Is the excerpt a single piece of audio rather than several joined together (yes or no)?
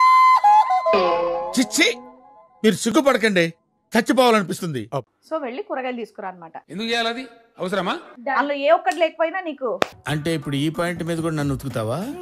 no